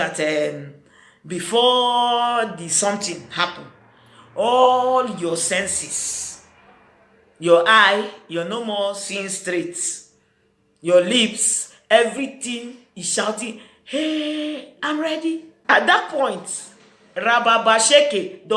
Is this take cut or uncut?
cut